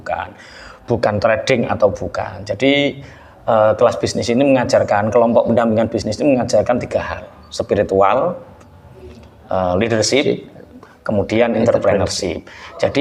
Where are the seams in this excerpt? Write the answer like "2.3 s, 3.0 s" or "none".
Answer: none